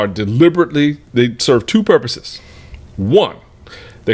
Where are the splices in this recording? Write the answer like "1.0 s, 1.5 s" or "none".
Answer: none

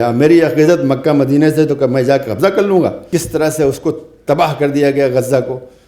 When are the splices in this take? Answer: 3.0 s

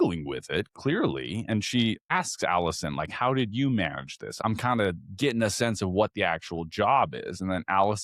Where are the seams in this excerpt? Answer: 2.1 s, 4.4 s

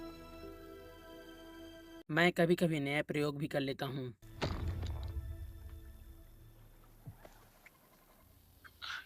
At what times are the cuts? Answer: none

